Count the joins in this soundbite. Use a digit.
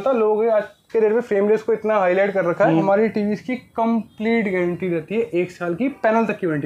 1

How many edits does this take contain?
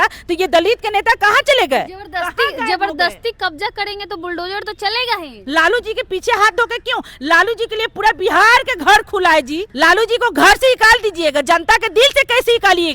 2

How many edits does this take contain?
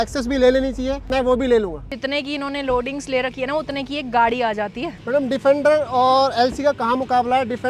3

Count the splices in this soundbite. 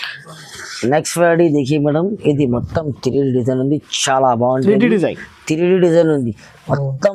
0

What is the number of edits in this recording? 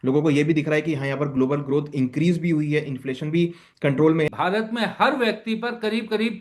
1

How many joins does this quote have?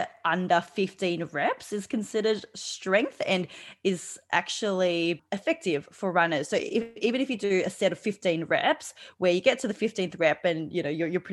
1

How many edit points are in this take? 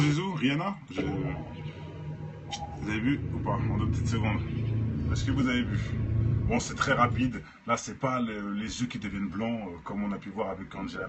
0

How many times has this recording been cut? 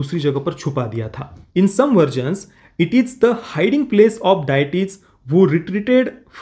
1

